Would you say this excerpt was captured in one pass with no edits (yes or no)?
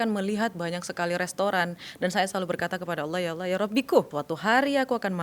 no